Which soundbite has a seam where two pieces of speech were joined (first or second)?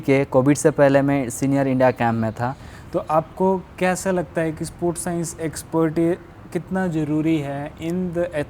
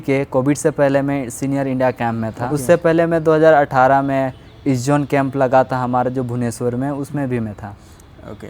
first